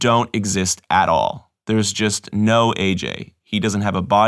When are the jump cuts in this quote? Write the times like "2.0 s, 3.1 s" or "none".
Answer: 1.5 s